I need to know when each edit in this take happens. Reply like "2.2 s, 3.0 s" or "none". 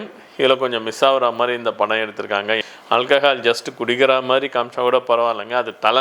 2.7 s

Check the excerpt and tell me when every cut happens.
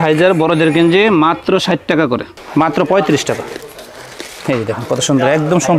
2.3 s

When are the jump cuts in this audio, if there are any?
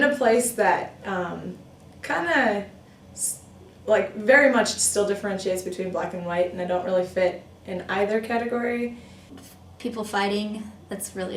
9.1 s

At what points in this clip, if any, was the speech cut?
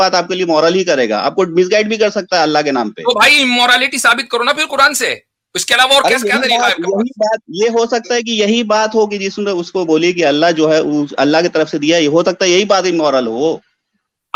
none

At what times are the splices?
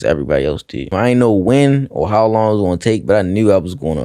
0.9 s

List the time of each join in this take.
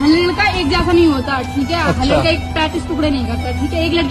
none

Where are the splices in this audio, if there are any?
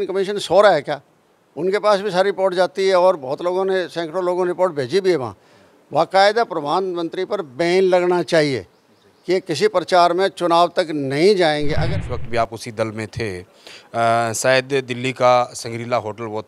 11.7 s

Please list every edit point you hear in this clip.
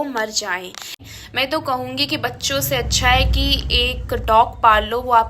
0.9 s

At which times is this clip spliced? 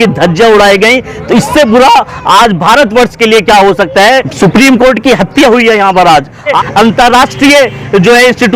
4.3 s, 6.6 s

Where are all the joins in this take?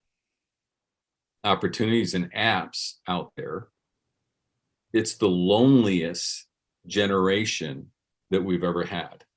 none

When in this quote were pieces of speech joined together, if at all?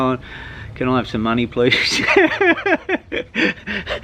none

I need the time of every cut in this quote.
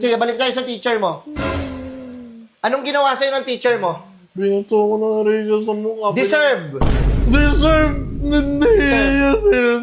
none

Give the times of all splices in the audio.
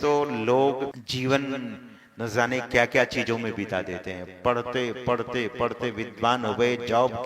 1.0 s

